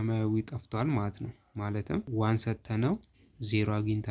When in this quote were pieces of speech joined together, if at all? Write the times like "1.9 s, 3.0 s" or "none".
2.1 s